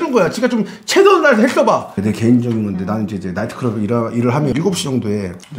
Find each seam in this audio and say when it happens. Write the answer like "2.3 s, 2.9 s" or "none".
1.9 s